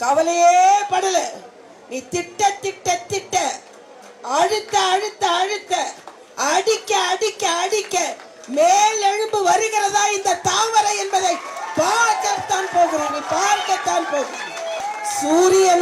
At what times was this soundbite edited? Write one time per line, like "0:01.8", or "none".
0:14.8